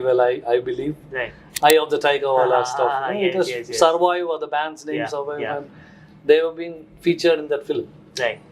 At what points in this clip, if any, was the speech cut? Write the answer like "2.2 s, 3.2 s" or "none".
1.4 s